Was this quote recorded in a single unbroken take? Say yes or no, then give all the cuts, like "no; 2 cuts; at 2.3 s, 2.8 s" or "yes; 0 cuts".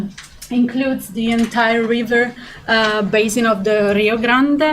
no; 1 cut; at 3.2 s